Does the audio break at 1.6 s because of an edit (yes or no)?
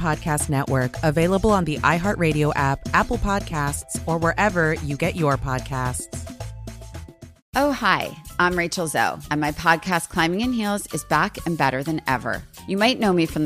no